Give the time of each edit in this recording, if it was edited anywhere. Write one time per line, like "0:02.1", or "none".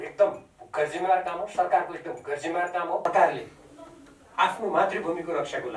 0:03.1